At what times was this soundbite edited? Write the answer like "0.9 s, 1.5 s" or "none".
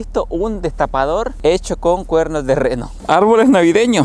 3.0 s